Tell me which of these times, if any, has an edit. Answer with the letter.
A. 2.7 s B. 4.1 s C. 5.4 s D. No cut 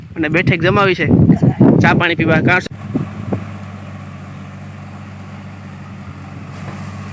A